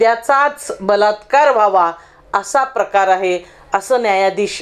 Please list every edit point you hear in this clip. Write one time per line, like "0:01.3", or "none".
none